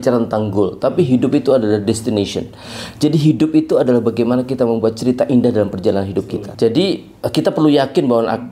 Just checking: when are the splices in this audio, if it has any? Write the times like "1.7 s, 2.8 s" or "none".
6.4 s